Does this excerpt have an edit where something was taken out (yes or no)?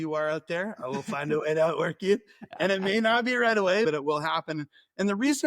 yes